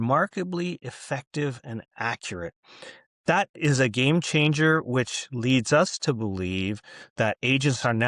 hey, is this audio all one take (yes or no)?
yes